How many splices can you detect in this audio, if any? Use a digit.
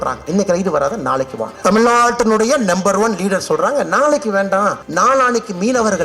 2